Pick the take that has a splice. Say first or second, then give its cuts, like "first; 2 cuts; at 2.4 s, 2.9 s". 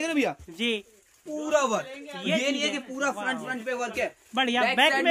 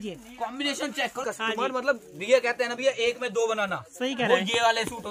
second; 1 cut; at 1.2 s